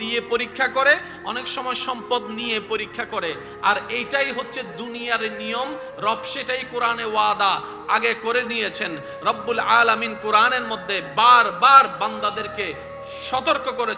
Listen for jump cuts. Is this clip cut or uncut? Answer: uncut